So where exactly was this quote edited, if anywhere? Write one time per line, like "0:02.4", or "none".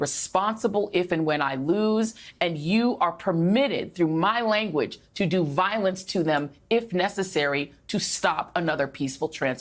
none

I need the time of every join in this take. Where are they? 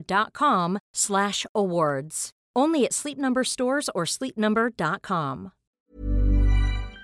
0:05.7

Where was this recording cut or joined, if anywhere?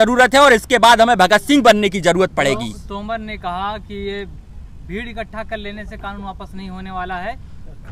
none

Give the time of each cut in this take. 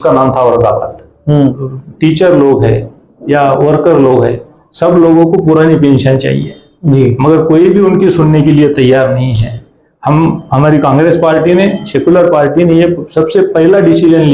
0:01.6

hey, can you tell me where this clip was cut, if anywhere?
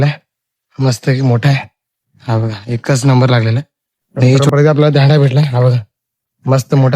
0:04.4

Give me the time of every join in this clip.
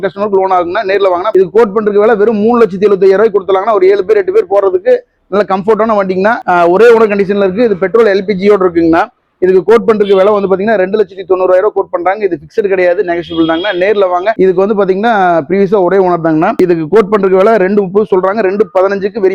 0:01.3
0:06.4
0:14.3

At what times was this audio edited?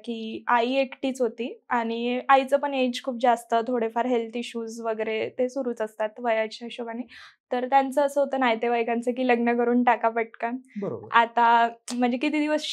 none

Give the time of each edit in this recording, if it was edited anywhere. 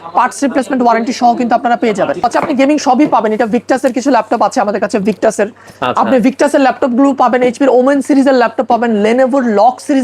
0:02.3

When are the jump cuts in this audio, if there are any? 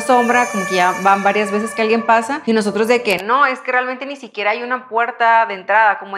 0:02.3

